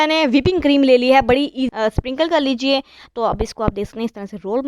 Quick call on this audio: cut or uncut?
cut